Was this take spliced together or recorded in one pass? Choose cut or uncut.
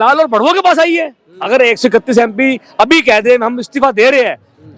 cut